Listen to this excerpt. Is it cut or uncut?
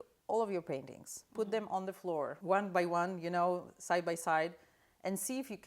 cut